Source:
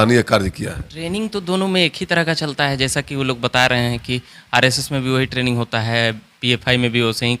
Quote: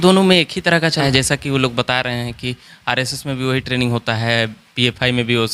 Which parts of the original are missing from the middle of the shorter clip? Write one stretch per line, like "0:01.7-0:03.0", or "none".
0:02.5-0:02.7